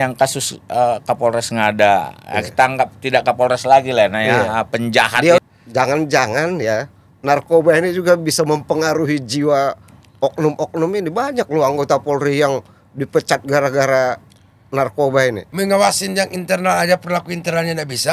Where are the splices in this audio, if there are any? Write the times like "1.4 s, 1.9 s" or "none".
5.4 s, 15.4 s

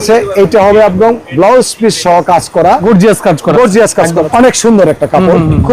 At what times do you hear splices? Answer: 2.8 s, 4.3 s

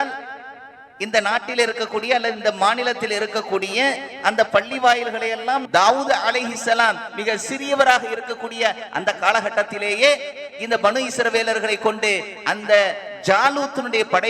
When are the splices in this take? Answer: 5.6 s

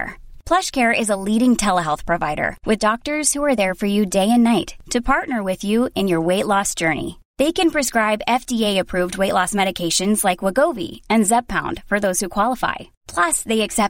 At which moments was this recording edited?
none

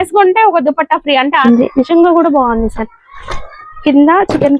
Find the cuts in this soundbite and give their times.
1.4 s

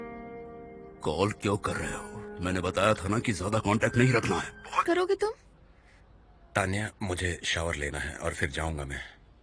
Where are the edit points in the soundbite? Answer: 4.8 s

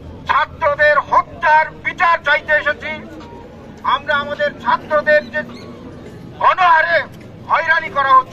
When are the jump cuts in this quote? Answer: none

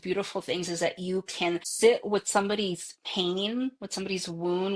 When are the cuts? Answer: 1.7 s

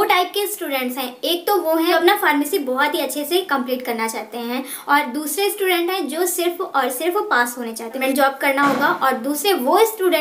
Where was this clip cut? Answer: 1.9 s, 8.0 s

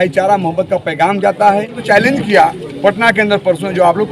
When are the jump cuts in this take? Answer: 1.8 s

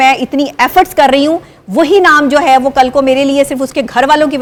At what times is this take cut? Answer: none

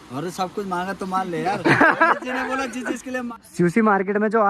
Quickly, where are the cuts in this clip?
3.3 s

